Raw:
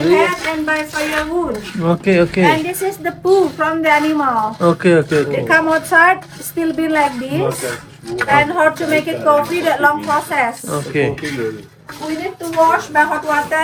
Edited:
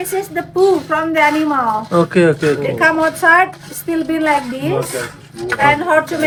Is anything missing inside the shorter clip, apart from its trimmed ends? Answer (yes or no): no